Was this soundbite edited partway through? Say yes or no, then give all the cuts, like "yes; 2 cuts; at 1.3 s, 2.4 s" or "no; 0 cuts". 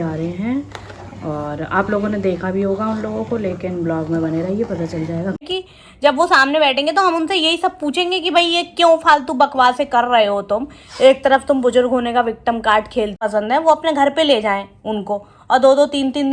yes; 2 cuts; at 5.4 s, 13.2 s